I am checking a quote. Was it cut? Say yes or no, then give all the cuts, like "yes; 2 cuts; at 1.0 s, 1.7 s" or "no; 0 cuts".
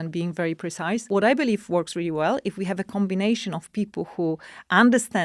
yes; 1 cut; at 1.1 s